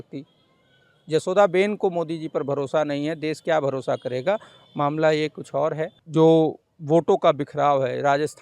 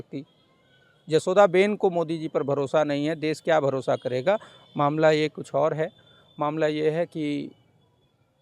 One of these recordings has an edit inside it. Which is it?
first; 1 cut; at 6.0 s

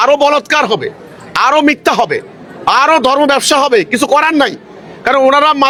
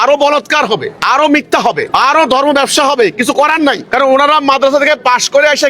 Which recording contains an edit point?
second; 3 cuts; at 0.9 s, 1.8 s, 3.8 s

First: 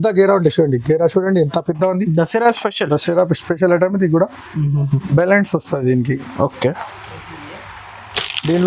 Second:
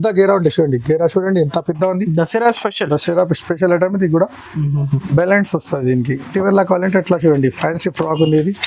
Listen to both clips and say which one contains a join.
second; 1 cut; at 6.3 s

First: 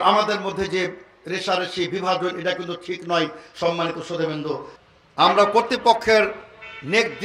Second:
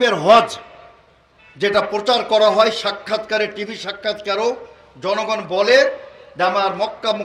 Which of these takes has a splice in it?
first; 1 cut; at 4.7 s

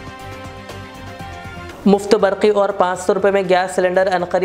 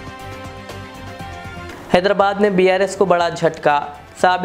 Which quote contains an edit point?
second; 1 cut; at 1.7 s

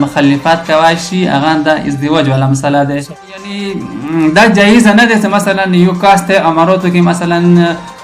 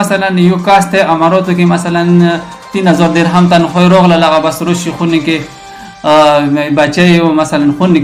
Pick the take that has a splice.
first; 1 cut; at 3.3 s

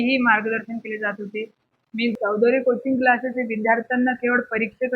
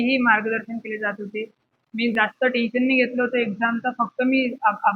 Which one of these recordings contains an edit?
first; 1 cut; at 2.2 s

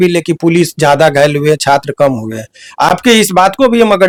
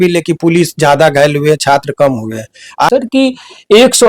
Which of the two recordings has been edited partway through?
second; 1 cut; at 2.9 s

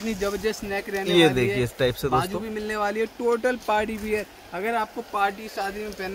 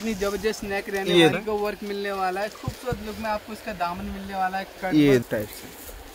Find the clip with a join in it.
second; 2 cuts; at 1.3 s, 5.2 s

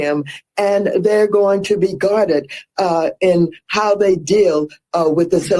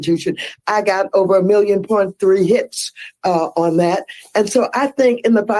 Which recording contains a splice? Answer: second; 1 cut; at 4.1 s

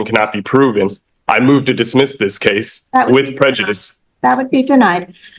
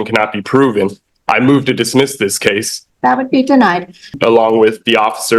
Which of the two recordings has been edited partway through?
second; 2 cuts; at 2.7 s, 4.1 s

